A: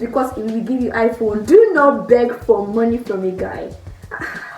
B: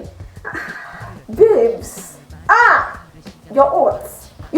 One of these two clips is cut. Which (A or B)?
A